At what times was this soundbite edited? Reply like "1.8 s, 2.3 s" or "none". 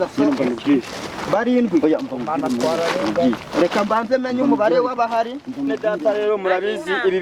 5.5 s